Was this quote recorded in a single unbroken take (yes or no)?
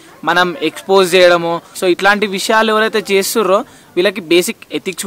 no